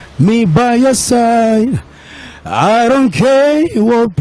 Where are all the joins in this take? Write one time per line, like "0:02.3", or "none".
none